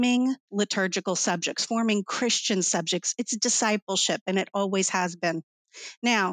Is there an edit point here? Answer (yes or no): no